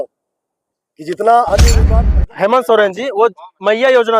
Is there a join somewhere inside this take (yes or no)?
yes